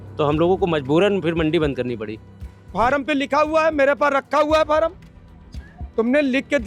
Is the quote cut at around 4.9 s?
no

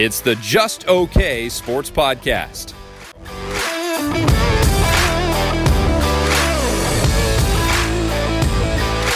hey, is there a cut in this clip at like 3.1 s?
yes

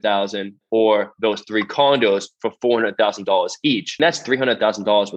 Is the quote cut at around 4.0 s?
yes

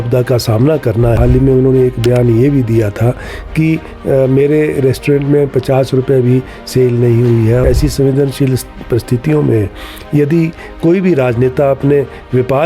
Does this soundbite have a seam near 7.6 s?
yes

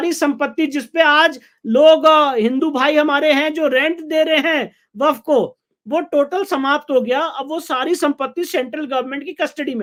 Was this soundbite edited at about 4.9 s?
no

